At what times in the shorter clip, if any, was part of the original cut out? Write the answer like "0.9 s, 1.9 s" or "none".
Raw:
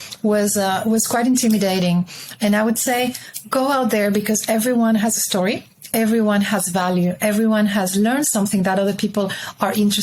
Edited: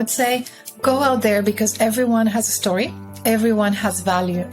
none